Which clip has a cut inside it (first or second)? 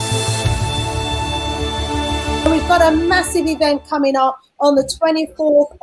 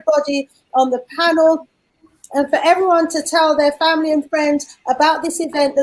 first